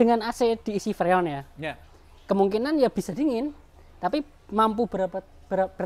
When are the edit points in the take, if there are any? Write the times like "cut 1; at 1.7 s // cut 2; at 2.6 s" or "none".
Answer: none